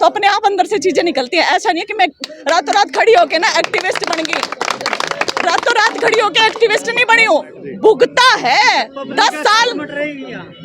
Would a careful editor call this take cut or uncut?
uncut